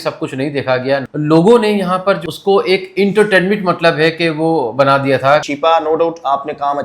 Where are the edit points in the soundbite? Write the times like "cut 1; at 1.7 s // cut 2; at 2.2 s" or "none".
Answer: cut 1; at 1.1 s // cut 2; at 2.2 s // cut 3; at 5.4 s